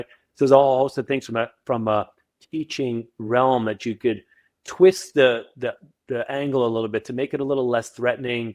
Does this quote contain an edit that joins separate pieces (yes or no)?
no